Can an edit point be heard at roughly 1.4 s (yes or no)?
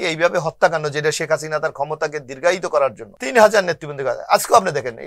no